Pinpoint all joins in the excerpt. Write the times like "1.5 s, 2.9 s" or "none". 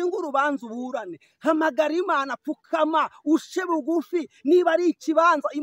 none